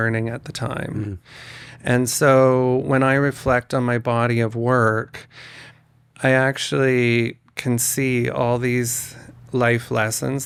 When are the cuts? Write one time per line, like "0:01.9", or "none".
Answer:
none